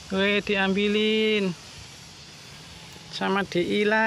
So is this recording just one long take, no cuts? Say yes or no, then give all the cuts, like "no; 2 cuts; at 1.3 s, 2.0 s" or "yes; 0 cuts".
yes; 0 cuts